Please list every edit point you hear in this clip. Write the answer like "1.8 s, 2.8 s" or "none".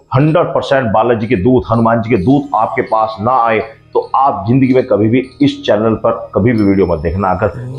none